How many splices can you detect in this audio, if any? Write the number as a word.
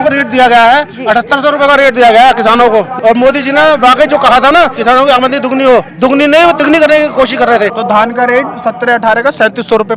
four